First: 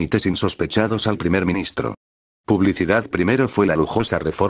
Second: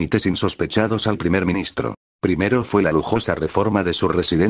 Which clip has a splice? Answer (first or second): second